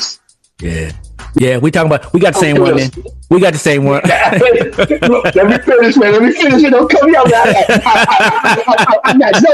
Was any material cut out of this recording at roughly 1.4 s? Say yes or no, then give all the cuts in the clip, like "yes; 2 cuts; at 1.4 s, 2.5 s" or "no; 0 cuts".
yes; 1 cut; at 1.4 s